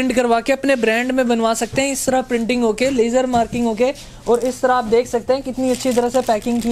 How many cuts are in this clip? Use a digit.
0